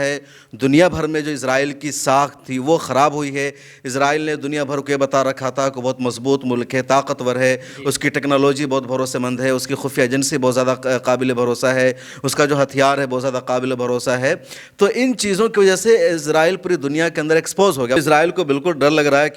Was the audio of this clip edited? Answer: yes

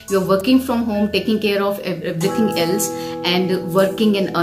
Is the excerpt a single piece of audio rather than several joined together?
yes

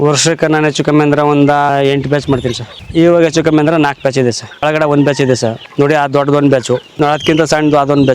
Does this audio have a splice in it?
yes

